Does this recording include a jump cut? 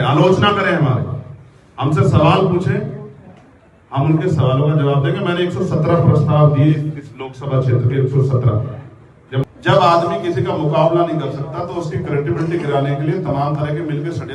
yes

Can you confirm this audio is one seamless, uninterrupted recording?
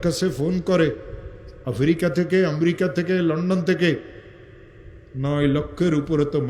yes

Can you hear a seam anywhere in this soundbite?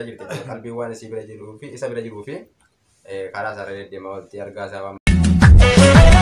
yes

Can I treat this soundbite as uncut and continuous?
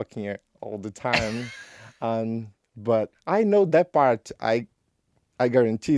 no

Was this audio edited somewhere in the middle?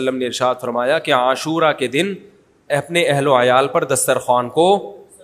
no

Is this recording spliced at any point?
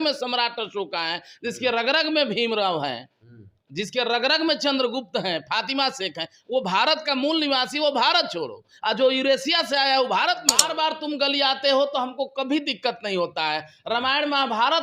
yes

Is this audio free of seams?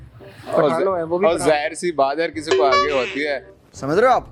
yes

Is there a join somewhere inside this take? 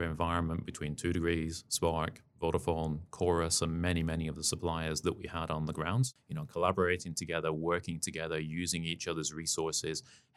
yes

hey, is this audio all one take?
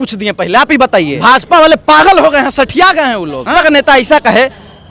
no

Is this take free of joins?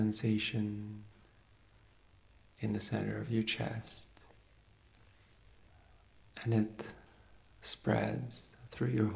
no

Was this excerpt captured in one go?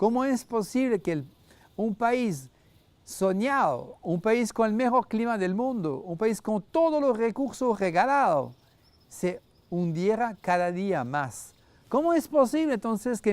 no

